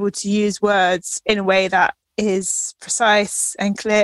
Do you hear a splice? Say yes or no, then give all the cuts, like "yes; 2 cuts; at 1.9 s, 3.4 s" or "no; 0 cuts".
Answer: yes; 2 cuts; at 1.1 s, 2.0 s